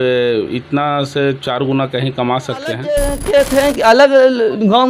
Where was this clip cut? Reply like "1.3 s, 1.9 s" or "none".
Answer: 2.8 s